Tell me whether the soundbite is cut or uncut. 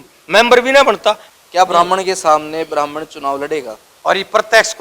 cut